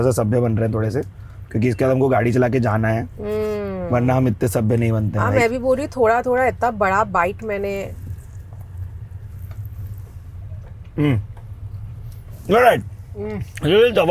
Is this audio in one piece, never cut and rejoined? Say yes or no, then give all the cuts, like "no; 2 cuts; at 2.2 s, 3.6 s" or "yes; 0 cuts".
yes; 0 cuts